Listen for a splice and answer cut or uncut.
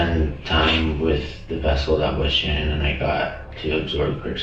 uncut